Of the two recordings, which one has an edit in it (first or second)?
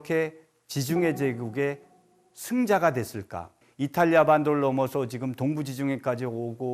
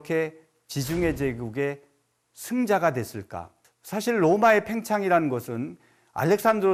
first